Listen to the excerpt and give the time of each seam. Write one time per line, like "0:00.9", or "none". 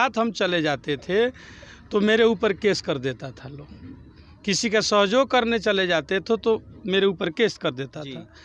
none